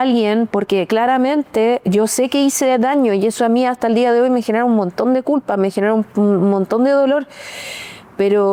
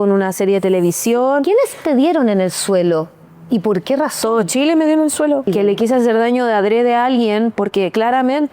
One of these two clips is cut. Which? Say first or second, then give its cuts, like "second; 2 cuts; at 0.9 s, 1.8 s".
second; 1 cut; at 5.5 s